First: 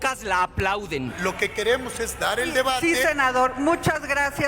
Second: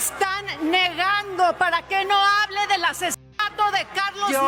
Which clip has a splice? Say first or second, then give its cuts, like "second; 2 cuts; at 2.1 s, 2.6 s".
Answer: first; 1 cut; at 1.2 s